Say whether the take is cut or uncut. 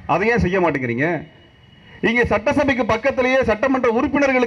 uncut